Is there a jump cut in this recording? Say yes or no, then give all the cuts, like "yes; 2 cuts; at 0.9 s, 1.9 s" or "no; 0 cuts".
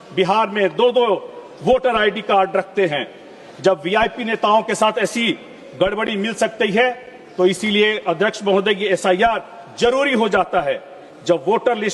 no; 0 cuts